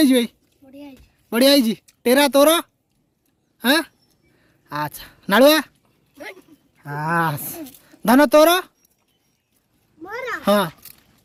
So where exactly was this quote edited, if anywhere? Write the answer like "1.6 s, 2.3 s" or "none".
none